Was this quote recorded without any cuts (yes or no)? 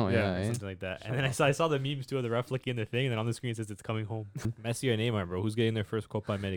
no